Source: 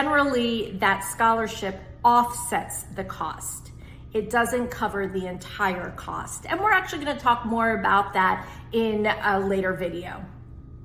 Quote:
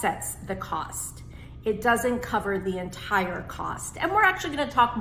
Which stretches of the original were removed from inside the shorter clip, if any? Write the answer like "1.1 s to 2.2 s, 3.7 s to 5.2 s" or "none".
none